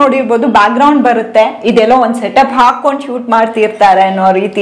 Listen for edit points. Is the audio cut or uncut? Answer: uncut